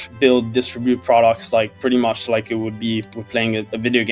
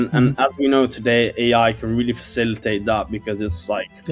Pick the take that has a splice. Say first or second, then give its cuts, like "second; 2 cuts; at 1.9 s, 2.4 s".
first; 1 cut; at 3.2 s